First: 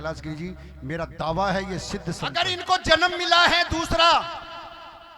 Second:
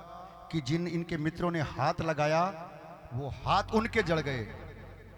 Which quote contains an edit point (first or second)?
first